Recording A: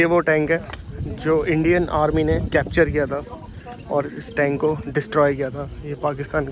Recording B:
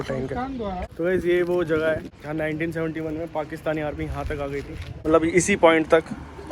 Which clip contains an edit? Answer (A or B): B